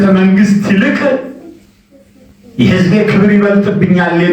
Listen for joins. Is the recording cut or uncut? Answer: uncut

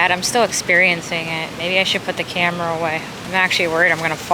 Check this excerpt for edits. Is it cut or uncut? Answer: cut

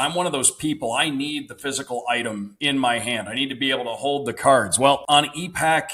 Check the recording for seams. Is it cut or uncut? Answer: cut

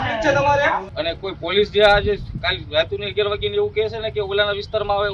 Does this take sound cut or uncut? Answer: cut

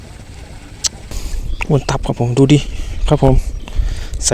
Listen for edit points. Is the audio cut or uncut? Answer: cut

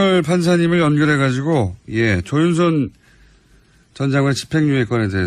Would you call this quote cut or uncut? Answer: uncut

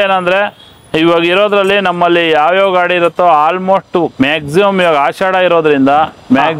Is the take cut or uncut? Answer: uncut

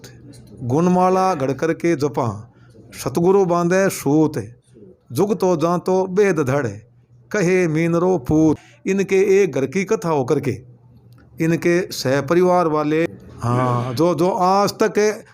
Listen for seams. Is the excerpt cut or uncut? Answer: cut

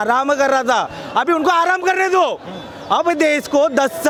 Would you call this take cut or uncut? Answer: uncut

